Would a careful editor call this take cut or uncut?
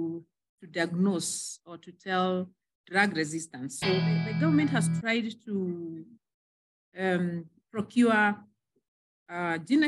cut